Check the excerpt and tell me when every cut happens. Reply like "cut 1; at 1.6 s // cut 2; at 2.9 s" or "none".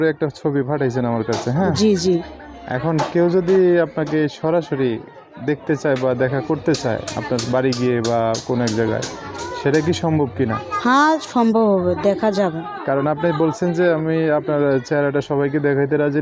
none